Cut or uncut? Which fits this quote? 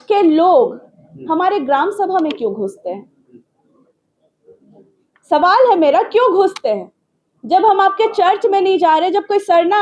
uncut